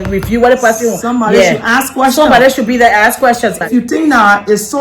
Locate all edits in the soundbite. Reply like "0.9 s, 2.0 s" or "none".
3.6 s